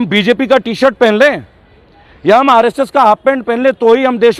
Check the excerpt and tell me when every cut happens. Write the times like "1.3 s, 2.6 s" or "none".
none